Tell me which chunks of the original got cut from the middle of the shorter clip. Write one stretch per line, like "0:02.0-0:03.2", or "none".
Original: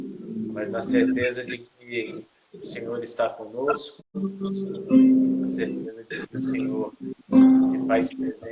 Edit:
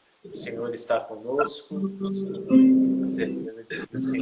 0:03.9-0:04.0